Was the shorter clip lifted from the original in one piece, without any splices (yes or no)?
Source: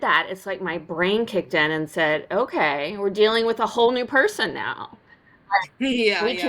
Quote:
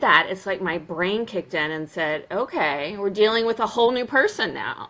yes